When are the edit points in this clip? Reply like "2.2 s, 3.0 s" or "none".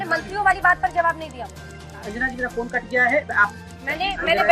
1.9 s, 3.6 s